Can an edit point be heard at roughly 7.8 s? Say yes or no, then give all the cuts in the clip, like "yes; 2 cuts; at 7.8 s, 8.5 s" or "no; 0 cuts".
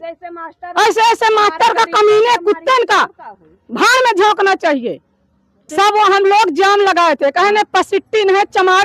no; 1 cut; at 5.7 s